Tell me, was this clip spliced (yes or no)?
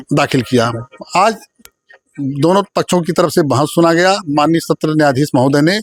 no